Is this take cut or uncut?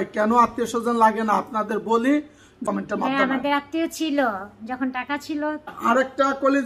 cut